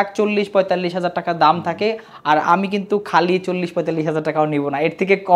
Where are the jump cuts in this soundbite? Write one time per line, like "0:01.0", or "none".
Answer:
none